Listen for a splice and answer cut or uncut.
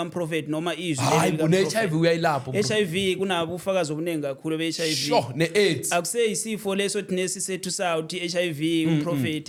uncut